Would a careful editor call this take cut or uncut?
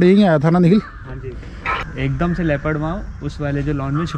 cut